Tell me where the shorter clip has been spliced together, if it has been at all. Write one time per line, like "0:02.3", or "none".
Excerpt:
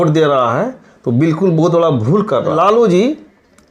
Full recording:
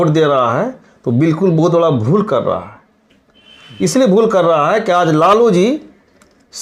0:02.5